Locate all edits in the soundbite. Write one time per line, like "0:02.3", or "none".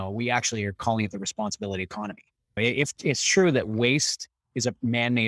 0:02.6